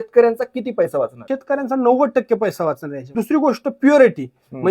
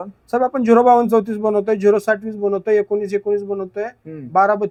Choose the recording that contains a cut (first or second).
first